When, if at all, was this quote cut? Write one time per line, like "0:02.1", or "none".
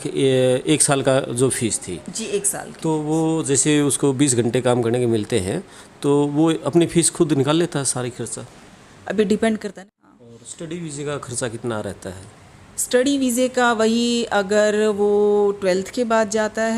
0:09.7